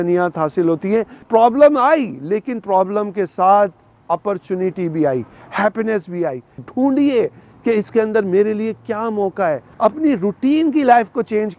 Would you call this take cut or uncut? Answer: cut